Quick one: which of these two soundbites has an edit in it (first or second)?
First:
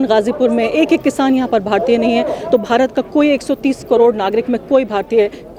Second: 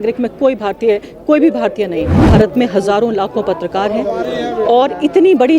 second